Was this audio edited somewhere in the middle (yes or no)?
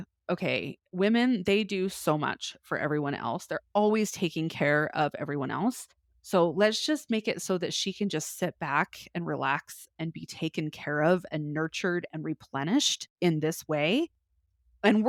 no